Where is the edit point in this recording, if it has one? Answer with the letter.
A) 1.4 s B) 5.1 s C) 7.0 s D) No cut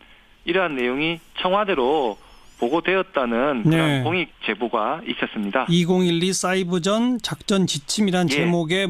C